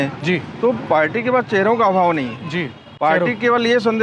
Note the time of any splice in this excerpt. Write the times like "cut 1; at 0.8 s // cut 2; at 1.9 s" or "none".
none